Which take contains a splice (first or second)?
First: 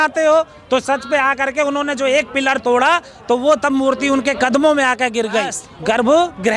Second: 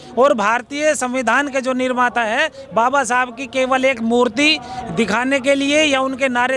first